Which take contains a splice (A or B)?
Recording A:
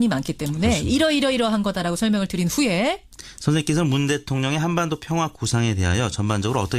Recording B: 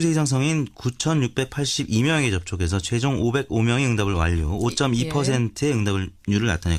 A